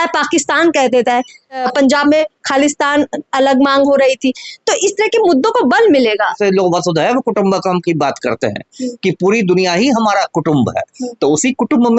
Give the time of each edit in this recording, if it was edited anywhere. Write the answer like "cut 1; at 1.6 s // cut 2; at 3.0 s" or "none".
cut 1; at 1.6 s // cut 2; at 6.4 s